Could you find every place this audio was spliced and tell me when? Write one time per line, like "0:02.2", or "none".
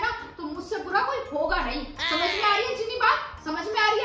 none